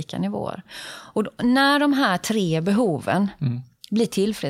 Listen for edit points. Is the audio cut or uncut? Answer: uncut